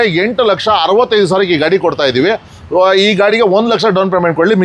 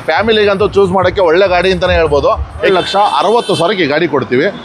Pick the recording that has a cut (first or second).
second